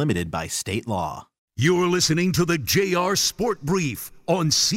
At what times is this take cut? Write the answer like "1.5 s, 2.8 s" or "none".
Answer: 1.4 s